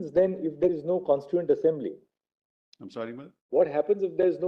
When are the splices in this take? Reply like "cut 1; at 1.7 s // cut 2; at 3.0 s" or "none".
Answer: none